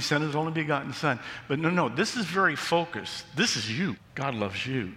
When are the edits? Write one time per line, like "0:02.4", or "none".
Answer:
0:04.1